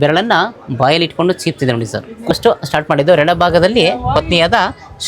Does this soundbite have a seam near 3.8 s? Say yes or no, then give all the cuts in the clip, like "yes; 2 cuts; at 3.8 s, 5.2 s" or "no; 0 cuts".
no; 1 cut; at 2.3 s